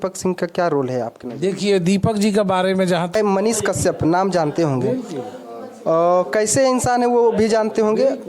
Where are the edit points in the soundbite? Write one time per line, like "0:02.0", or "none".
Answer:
0:03.2